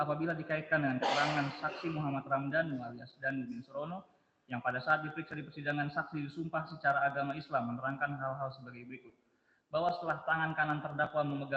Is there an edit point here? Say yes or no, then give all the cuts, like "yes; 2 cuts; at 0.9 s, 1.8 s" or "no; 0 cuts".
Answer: no; 0 cuts